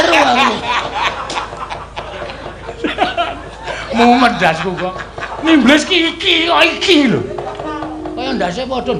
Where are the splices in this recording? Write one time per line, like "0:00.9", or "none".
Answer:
none